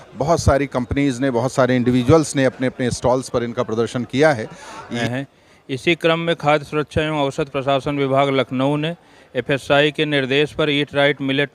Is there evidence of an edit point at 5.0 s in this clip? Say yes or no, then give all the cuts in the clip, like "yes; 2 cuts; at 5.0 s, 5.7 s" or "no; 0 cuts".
yes; 1 cut; at 5.0 s